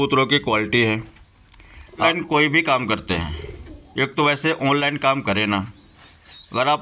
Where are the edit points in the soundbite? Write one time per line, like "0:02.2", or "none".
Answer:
0:02.0